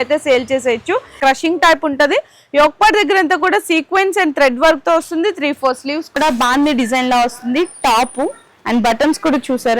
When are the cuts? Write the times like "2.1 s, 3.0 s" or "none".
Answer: 1.2 s, 6.2 s